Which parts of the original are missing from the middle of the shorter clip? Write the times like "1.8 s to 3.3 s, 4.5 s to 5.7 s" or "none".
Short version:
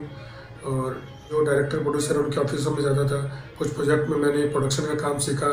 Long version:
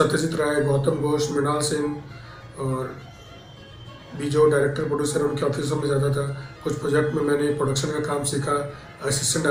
3.3 s to 4.4 s